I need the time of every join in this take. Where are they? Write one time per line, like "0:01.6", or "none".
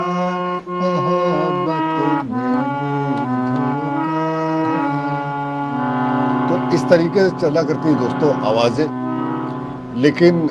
none

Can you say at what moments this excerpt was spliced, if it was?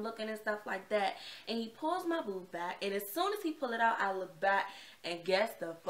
none

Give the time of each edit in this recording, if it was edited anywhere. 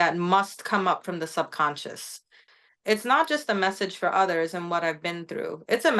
0:02.3

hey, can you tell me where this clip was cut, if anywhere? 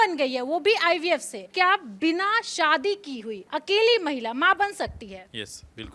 0:01.5

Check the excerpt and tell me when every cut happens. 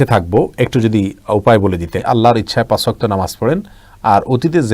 0:02.0

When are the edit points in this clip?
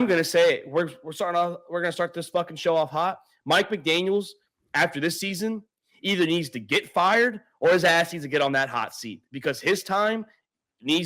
none

